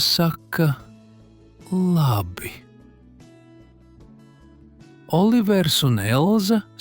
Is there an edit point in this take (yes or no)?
yes